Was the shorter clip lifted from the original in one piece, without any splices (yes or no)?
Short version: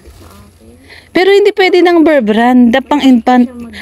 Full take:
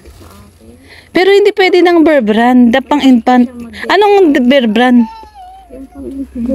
yes